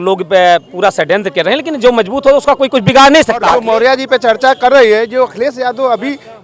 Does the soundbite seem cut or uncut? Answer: cut